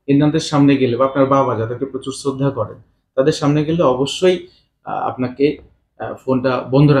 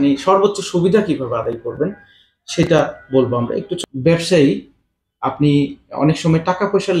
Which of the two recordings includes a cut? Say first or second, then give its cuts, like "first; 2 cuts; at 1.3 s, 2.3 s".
second; 1 cut; at 3.7 s